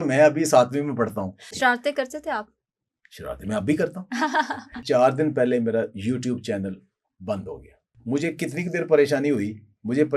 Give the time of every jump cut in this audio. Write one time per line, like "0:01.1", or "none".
0:01.5
0:04.8
0:07.9

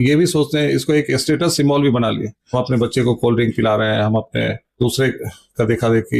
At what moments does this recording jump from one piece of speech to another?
none

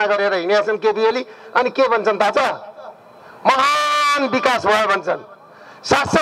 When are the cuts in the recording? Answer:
none

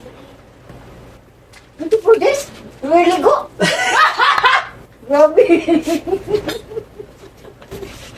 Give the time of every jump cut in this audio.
none

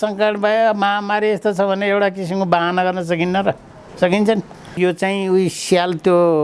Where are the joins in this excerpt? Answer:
0:04.7

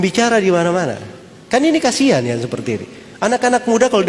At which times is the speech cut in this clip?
none

